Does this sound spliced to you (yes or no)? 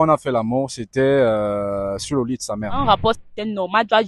yes